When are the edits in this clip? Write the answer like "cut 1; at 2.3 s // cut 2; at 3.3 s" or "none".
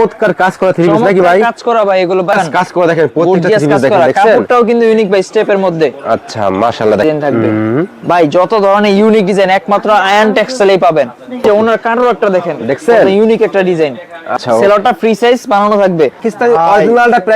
cut 1; at 2.3 s // cut 2; at 7.0 s // cut 3; at 11.4 s // cut 4; at 14.4 s // cut 5; at 16.3 s